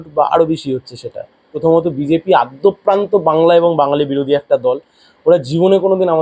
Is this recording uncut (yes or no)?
no